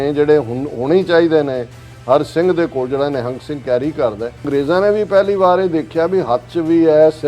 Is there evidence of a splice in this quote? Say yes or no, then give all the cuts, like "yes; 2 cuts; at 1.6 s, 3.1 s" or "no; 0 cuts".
yes; 1 cut; at 4.5 s